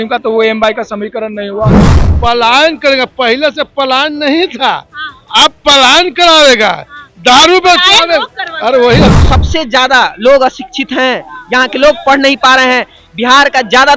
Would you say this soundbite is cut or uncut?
cut